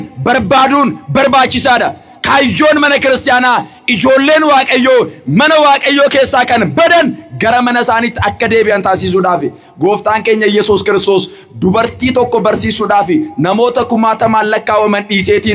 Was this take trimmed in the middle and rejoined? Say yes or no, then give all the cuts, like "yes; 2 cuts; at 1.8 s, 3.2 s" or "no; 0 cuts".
no; 0 cuts